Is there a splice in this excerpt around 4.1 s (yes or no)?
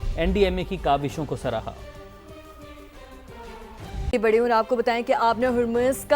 yes